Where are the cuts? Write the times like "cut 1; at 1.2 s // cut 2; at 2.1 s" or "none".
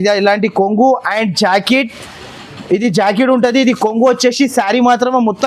none